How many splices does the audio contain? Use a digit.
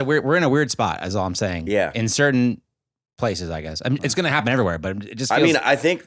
0